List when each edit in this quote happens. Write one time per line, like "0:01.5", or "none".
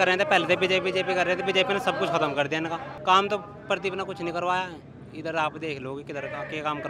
0:02.9